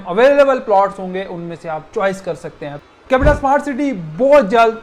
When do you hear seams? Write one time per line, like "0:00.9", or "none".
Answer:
0:02.9